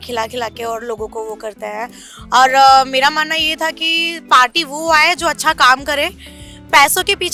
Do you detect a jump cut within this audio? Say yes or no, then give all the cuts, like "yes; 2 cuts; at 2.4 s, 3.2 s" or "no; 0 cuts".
no; 0 cuts